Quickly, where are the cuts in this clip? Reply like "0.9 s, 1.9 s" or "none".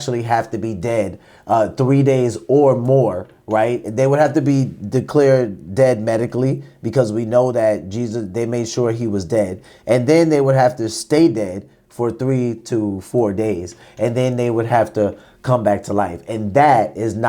none